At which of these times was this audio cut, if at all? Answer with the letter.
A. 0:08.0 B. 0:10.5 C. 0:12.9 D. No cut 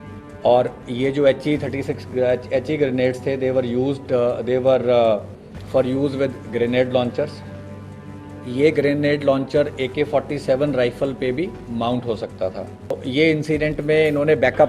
C